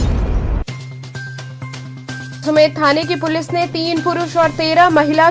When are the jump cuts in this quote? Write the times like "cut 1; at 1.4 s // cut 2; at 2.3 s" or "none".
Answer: none